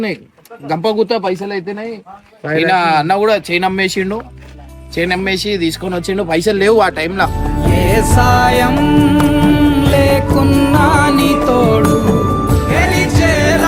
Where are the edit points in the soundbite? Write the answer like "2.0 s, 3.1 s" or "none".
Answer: none